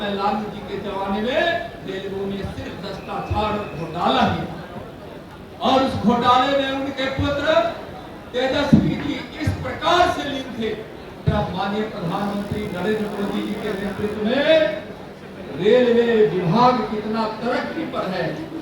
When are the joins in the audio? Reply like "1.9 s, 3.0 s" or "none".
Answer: 11.2 s